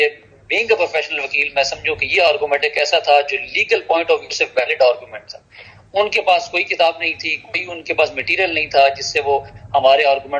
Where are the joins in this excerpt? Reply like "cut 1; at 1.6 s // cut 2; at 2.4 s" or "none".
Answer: none